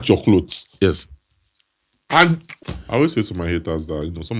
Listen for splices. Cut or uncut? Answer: cut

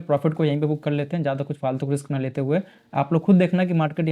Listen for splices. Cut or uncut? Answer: uncut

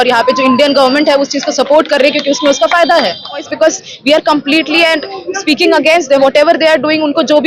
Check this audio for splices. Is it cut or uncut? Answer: cut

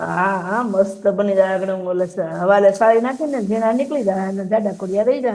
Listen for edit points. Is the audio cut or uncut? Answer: uncut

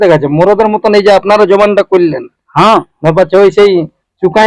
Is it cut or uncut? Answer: uncut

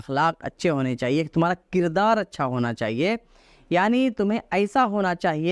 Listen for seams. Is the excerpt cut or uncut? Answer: uncut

